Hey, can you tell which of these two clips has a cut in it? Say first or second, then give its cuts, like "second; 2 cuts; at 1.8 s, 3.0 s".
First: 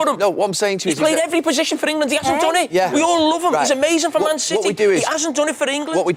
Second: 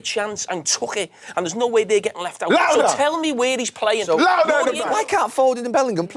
second; 1 cut; at 4.8 s